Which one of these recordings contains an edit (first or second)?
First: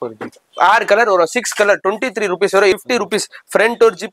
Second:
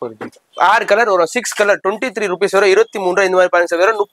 first